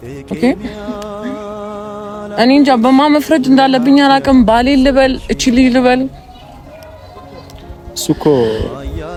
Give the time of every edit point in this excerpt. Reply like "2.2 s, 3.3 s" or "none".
none